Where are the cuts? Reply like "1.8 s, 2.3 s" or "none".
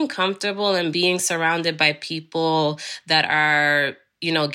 0.9 s